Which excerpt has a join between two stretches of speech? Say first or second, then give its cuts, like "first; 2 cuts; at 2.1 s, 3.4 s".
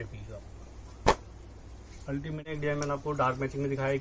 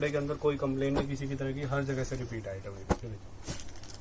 first; 1 cut; at 2.5 s